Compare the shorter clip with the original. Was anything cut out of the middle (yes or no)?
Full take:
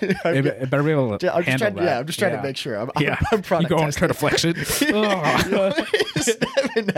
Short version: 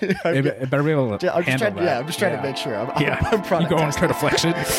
no